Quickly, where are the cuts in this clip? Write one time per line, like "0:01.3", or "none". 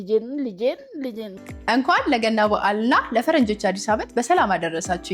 0:01.4

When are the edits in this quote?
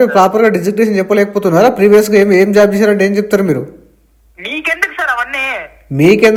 none

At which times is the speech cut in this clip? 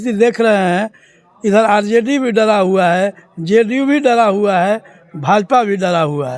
none

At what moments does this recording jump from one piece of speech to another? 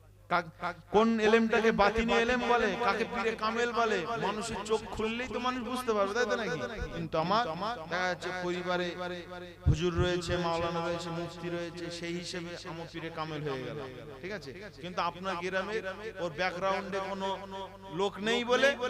0:06.9

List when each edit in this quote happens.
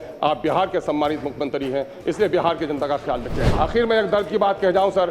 0:03.4

